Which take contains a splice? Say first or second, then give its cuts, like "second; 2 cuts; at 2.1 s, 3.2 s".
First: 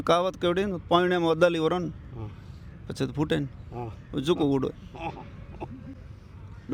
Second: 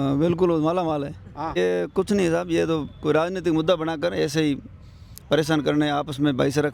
second; 1 cut; at 1.6 s